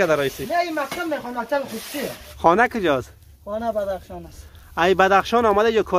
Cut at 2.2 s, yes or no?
yes